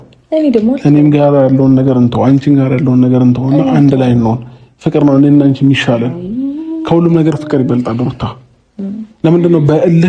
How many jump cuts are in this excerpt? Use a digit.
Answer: 0